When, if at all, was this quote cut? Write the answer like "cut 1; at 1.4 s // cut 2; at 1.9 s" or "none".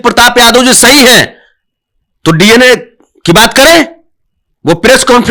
none